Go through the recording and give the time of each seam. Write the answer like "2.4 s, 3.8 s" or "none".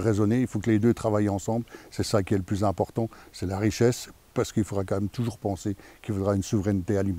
none

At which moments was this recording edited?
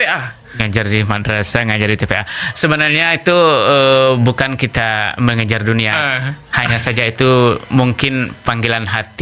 none

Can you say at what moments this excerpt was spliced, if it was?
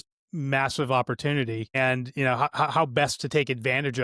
1.7 s

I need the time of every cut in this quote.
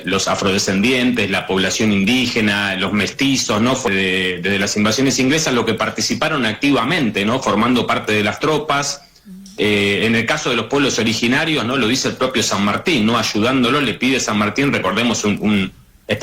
3.9 s

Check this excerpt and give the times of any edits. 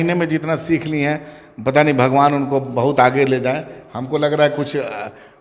none

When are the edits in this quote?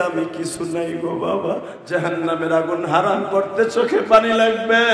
1.7 s

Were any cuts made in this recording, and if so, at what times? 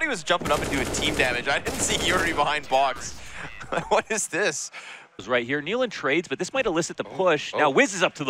5.2 s

